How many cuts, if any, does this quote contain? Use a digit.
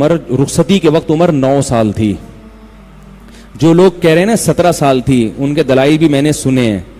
0